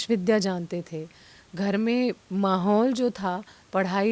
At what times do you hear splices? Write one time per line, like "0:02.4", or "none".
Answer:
none